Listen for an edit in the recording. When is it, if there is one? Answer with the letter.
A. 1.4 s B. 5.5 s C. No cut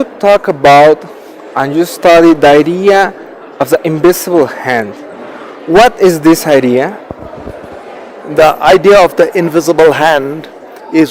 B